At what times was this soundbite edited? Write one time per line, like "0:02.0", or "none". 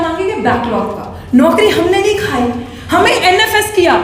none

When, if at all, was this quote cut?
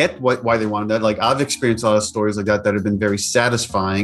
none

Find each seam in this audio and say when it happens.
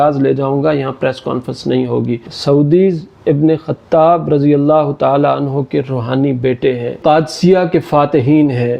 0:02.3
0:07.0

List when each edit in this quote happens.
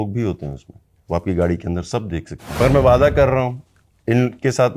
0:02.6

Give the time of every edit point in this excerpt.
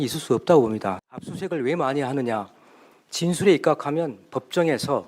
0:00.9

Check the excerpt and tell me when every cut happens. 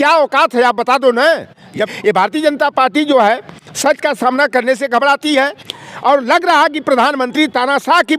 0:01.8
0:05.6

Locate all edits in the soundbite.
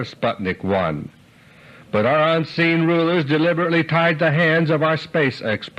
none

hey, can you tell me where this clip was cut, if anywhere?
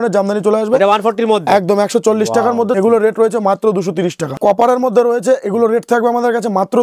0:02.7
0:04.3

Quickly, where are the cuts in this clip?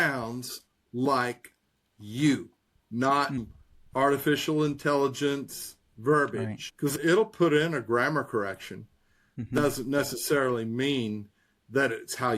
0:03.4
0:06.6
0:09.3

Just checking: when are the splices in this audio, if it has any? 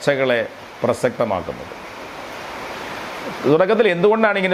none

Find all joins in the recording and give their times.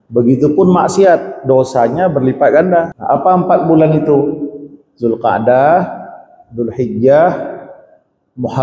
0:02.9

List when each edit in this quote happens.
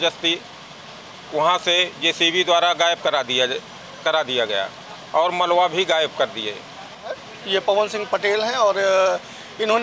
0:07.3

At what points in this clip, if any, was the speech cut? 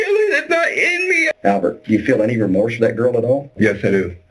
0:01.3

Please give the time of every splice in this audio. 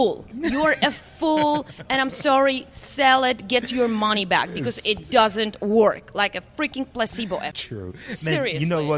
0:07.6

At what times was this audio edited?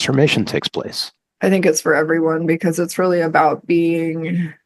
0:01.2

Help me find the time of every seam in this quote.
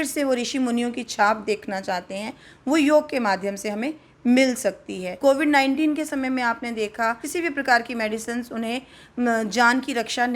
0:05.2
0:07.2

